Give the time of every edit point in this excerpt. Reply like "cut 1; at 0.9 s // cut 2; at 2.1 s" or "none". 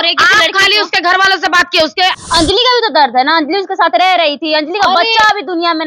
cut 1; at 2.2 s